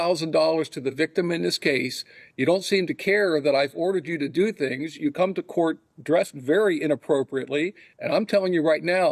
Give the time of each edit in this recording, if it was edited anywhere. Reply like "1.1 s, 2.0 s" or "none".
none